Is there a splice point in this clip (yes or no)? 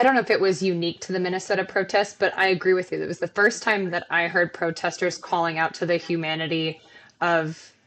no